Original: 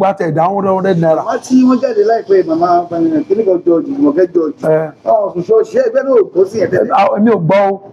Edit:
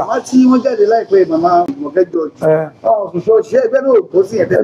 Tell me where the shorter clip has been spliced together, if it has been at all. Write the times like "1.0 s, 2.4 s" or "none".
1.7 s